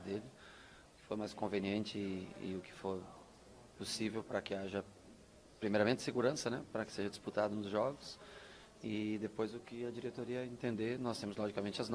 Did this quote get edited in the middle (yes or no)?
yes